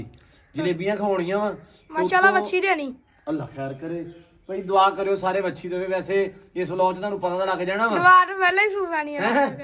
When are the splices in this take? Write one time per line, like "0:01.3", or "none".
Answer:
none